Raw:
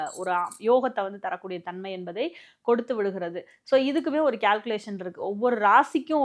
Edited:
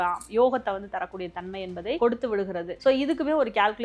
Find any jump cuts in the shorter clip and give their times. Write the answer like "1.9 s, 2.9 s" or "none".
2.0 s, 2.7 s